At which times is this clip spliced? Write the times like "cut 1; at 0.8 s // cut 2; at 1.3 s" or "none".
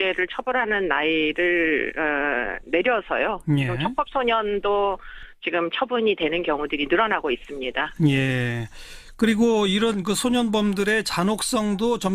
cut 1; at 10.7 s